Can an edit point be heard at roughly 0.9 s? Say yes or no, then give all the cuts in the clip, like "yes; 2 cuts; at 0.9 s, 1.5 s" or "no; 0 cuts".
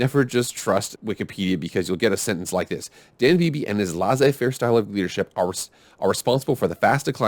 yes; 1 cut; at 0.9 s